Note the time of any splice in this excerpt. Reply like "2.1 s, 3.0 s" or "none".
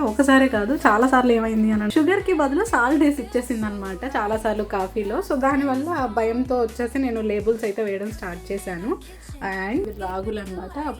1.9 s, 9.8 s